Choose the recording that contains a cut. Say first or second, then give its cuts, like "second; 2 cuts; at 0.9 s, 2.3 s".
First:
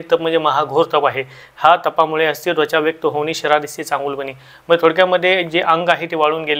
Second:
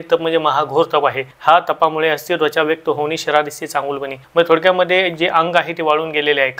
second; 2 cuts; at 1.3 s, 4.2 s